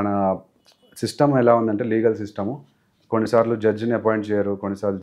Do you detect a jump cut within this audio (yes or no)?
no